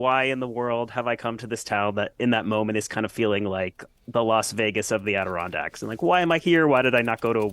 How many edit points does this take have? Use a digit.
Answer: 0